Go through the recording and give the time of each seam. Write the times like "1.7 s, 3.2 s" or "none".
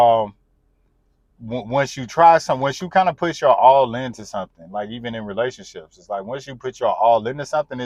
none